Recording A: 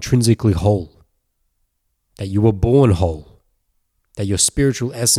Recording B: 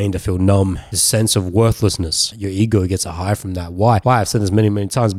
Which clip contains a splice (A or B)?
B